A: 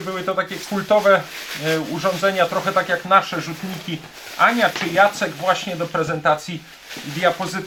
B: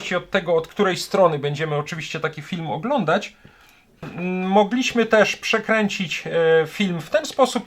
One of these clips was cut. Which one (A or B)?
B